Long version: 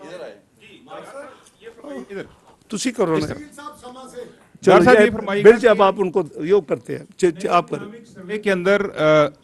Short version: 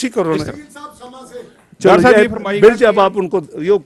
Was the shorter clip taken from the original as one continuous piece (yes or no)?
yes